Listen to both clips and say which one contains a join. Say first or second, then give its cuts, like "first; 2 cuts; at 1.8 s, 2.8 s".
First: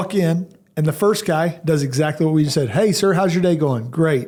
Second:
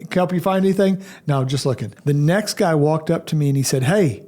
second; 1 cut; at 1.9 s